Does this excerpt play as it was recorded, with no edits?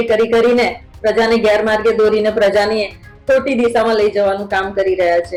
yes; 0 cuts

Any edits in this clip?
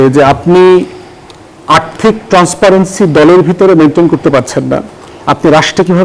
no; 0 cuts

